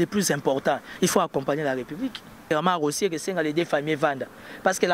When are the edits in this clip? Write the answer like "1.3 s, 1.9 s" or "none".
2.5 s